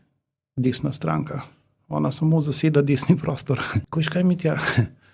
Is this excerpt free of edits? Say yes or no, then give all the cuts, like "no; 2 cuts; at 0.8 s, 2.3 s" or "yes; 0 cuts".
no; 1 cut; at 3.8 s